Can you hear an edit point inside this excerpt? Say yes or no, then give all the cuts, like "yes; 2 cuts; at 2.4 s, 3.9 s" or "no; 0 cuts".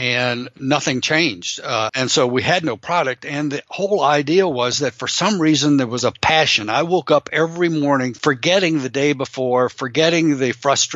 yes; 2 cuts; at 1.9 s, 8.1 s